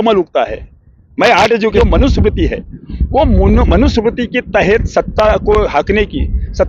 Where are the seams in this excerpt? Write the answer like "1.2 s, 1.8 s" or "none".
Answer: 1.8 s